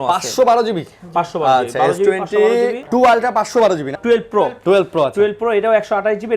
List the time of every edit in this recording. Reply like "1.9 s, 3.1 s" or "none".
2.8 s, 4.0 s